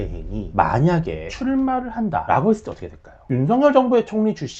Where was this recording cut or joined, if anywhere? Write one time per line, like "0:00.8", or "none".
0:03.3